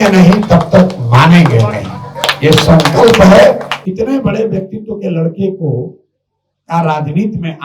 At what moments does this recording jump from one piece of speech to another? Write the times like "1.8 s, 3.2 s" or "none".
3.8 s